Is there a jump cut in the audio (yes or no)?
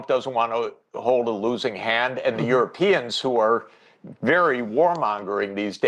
no